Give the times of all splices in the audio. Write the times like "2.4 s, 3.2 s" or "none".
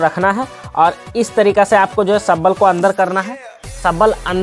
none